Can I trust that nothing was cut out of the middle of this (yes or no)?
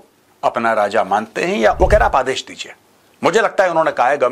no